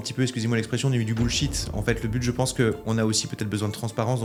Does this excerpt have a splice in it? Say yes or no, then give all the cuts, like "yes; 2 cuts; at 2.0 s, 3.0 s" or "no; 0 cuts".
no; 0 cuts